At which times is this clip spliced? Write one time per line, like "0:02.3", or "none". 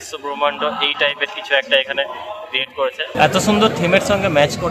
0:03.1